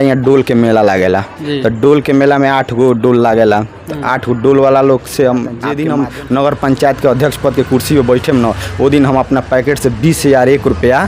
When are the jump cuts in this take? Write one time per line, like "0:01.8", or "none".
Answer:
0:05.7

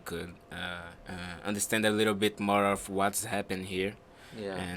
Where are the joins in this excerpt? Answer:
0:00.9

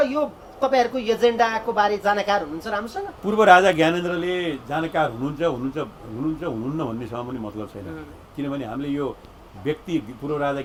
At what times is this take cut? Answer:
none

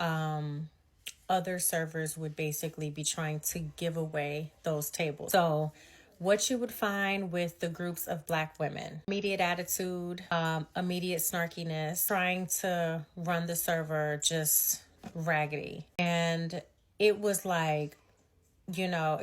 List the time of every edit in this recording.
0:05.2
0:09.1
0:10.3
0:12.0
0:16.0

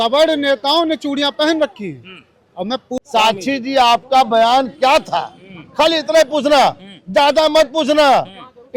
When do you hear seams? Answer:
0:02.9

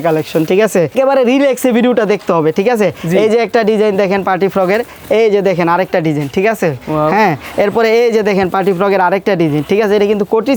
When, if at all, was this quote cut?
none

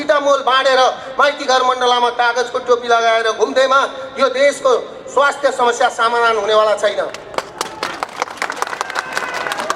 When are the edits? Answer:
none

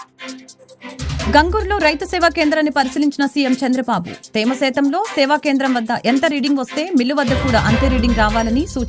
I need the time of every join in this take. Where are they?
0:01.3

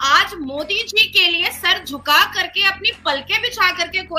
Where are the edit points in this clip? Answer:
none

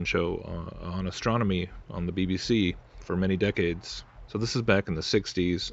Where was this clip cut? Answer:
none

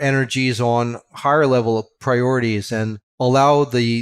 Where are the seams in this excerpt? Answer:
0:01.9
0:03.0

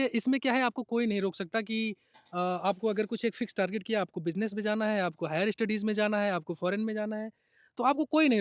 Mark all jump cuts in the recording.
none

